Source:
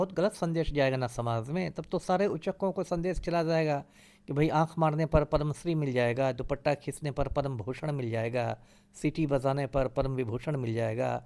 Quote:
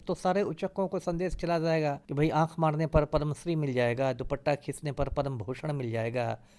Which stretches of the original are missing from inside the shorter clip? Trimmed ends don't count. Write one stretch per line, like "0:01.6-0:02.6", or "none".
0:03.9-0:04.2